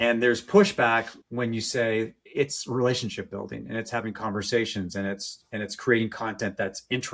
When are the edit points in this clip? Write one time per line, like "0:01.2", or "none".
0:01.2
0:02.2

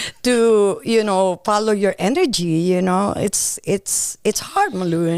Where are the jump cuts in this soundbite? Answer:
none

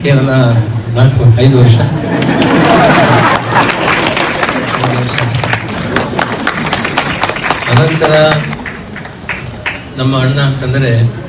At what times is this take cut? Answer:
0:05.9

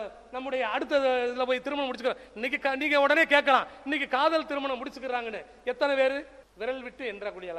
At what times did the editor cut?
0:06.4

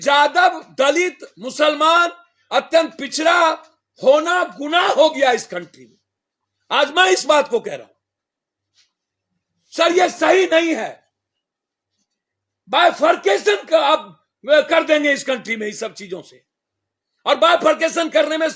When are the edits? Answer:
none

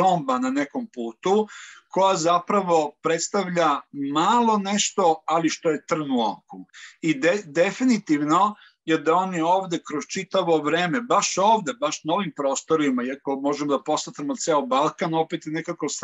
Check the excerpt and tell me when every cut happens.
none

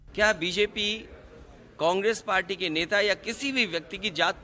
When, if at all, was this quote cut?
none

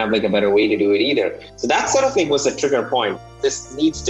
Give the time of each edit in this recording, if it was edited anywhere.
0:03.2

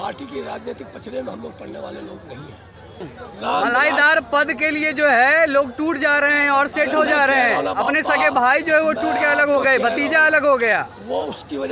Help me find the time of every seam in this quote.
0:03.1

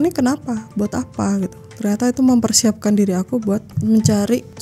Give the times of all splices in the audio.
none

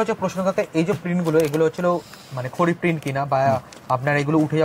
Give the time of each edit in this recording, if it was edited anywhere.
none

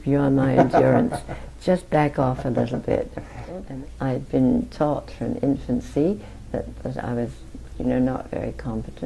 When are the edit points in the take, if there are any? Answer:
0:03.6

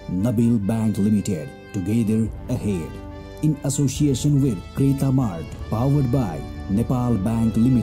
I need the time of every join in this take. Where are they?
none

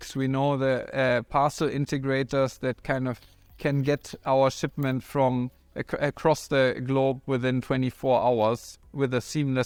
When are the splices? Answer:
none

